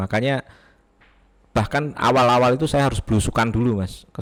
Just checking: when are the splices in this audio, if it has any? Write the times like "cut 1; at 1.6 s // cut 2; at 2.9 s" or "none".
none